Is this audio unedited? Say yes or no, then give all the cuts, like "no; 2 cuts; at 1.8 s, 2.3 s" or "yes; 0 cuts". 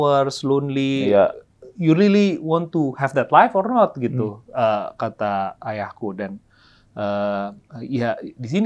yes; 0 cuts